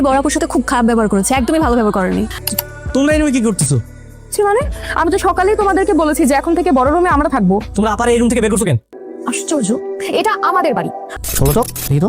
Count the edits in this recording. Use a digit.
2